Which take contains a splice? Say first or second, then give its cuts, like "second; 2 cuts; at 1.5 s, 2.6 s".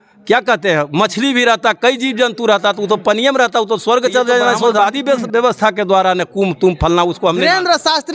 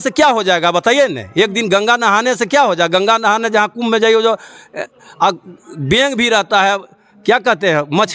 first; 1 cut; at 4.8 s